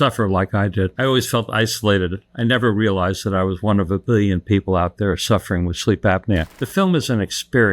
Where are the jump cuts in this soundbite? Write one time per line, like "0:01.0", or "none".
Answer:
0:00.9
0:06.6